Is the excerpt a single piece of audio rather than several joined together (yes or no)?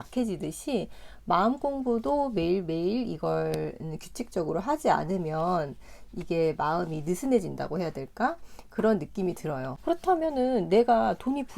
no